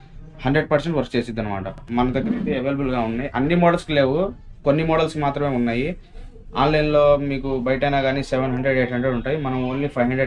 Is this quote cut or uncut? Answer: cut